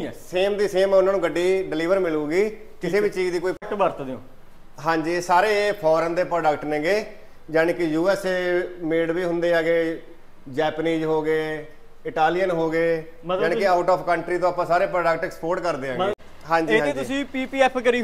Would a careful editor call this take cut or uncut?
cut